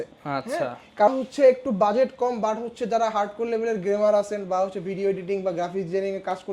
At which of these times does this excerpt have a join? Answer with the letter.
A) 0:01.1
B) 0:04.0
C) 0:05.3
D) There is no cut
A